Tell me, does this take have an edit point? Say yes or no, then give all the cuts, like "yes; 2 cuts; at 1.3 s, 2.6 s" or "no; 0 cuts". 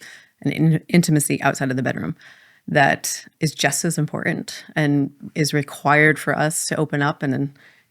yes; 1 cut; at 3.3 s